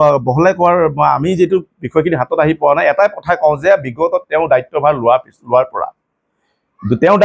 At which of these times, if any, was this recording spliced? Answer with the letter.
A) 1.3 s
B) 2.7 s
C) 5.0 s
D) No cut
D